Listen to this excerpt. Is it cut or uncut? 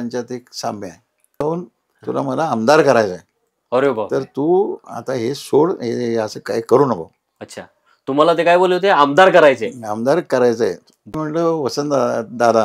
cut